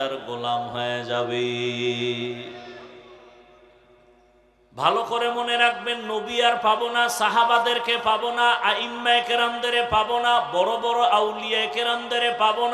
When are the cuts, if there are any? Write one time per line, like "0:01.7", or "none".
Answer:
0:04.3